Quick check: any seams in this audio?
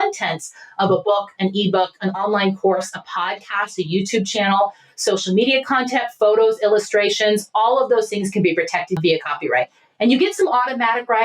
yes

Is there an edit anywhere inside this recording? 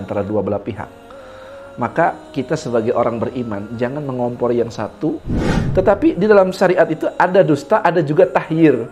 yes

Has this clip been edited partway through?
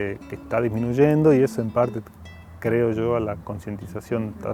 no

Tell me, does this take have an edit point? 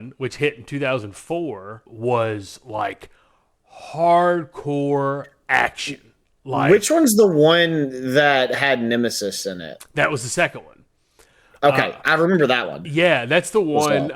yes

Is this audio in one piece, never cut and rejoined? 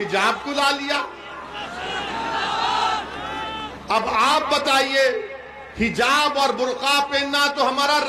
yes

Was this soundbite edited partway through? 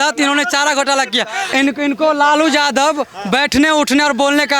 yes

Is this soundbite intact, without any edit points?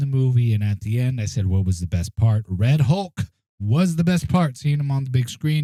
yes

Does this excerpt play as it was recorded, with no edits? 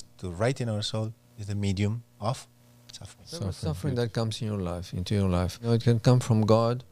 no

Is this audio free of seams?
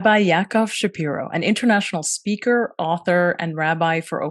yes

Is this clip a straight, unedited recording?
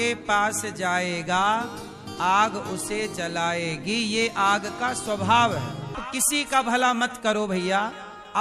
no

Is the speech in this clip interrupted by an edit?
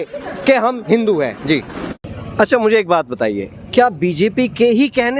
yes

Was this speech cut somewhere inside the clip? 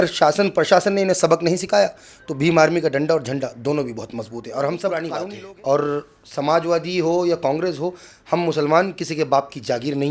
yes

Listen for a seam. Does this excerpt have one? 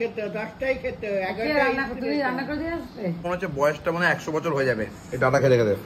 yes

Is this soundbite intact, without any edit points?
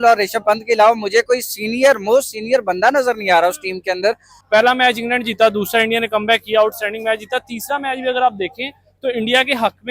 no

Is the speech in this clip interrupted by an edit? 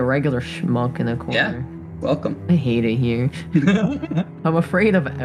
no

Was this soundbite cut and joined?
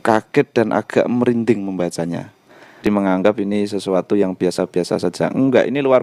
yes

